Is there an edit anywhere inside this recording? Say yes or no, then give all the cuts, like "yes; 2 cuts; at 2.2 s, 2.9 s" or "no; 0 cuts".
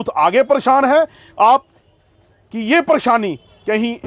no; 0 cuts